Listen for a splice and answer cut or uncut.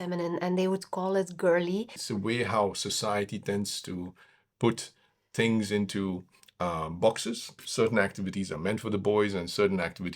cut